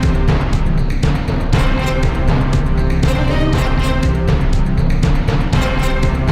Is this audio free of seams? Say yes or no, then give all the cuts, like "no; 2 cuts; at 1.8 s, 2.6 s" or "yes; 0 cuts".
yes; 0 cuts